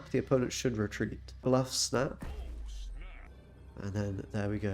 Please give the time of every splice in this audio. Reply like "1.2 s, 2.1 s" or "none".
1.4 s, 3.3 s